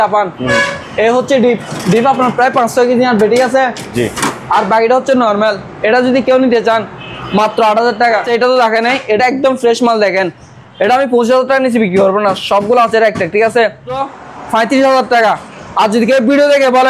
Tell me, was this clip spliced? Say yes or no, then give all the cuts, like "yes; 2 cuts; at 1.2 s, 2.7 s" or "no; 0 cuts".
yes; 2 cuts; at 8.3 s, 14.0 s